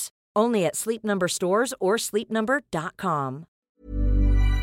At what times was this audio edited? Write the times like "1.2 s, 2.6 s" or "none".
3.7 s